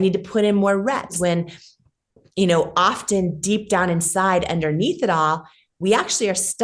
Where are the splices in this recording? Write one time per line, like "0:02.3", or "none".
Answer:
0:01.2